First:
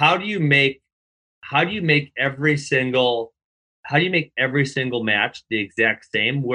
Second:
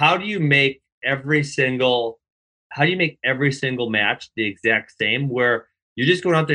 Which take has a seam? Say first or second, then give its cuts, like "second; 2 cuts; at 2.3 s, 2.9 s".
second; 1 cut; at 1.0 s